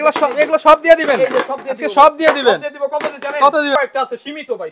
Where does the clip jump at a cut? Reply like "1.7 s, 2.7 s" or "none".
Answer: 3.7 s